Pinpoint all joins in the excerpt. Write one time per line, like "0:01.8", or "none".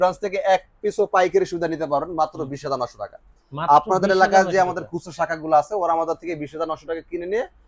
none